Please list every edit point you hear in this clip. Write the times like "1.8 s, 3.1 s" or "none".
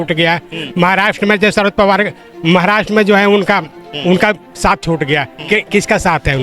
none